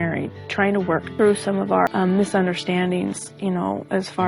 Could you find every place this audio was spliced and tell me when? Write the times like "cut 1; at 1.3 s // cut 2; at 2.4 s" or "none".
cut 1; at 1.1 s // cut 2; at 1.9 s